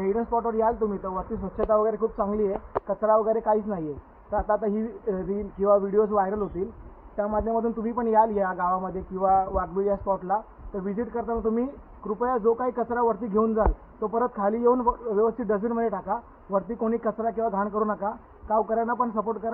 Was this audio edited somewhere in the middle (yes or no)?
no